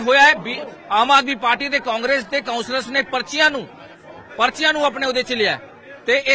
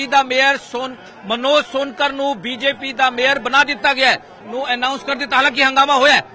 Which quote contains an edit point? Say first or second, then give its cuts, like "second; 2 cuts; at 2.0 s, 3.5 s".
second; 1 cut; at 4.3 s